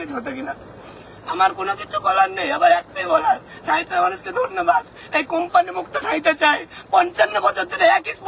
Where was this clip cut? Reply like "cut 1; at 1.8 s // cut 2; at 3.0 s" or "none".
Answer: none